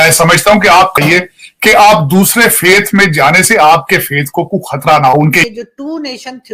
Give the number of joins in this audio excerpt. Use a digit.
2